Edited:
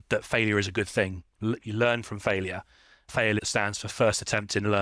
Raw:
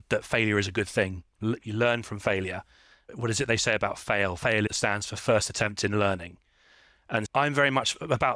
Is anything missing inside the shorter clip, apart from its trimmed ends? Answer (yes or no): yes